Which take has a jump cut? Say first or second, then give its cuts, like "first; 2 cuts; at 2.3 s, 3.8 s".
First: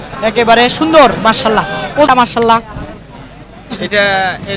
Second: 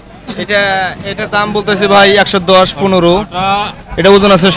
first; 1 cut; at 2.1 s